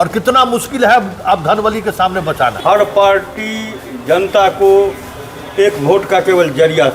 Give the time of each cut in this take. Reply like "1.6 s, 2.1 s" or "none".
2.6 s